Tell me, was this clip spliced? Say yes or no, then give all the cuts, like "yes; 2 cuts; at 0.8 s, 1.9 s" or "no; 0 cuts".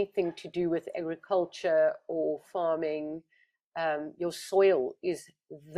no; 0 cuts